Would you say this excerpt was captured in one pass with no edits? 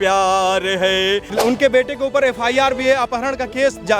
no; 1 cut; at 1.3 s

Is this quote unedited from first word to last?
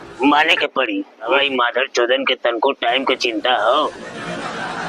no; 1 cut; at 1.3 s

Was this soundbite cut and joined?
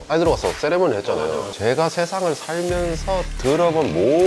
yes; 1 cut; at 1.5 s

